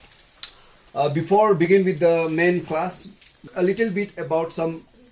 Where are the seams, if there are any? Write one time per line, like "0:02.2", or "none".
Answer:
0:03.4